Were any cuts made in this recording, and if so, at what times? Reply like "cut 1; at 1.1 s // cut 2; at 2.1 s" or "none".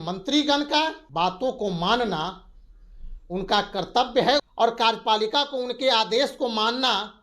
cut 1; at 1.0 s // cut 2; at 4.4 s